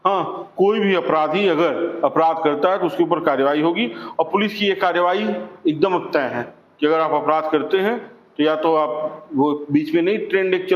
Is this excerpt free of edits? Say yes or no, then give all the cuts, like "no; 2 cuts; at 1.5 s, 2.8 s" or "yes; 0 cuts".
yes; 0 cuts